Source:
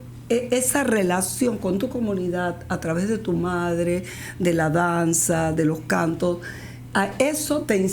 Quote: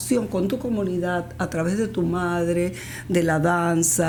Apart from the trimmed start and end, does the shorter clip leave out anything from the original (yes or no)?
no